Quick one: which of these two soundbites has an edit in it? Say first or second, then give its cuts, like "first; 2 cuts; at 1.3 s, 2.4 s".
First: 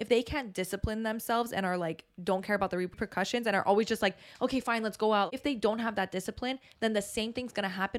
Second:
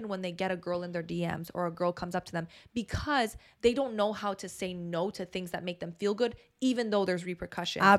first; 2 cuts; at 3.0 s, 5.3 s